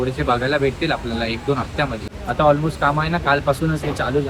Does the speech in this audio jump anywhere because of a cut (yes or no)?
yes